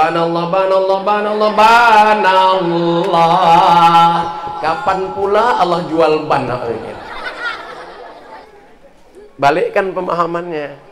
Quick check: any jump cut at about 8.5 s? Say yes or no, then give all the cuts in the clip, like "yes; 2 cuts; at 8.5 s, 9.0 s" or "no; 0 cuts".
yes; 1 cut; at 8.5 s